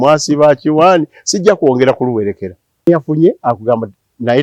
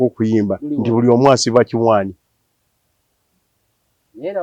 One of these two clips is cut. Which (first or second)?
first